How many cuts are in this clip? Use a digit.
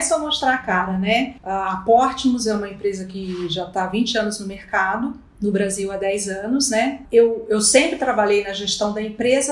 3